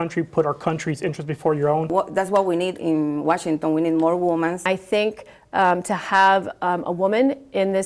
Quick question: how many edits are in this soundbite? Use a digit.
2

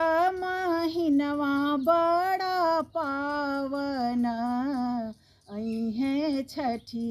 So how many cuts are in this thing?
0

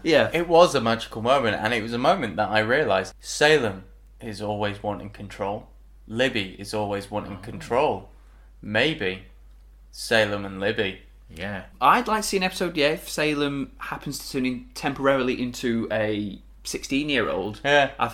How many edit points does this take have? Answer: 2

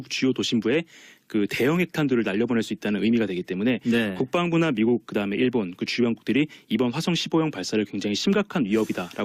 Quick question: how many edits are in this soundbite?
1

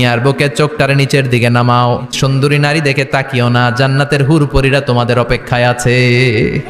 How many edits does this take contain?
1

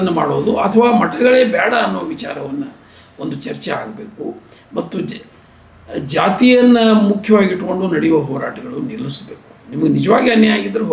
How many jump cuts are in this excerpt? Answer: 0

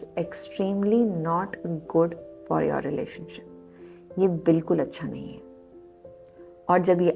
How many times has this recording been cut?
0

